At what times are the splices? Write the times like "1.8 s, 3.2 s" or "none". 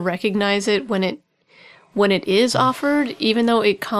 none